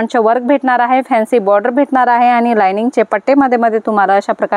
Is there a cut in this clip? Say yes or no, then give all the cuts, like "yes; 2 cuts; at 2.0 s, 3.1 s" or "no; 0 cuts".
no; 0 cuts